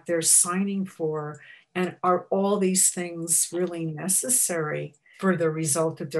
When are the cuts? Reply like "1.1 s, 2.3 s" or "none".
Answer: 5.0 s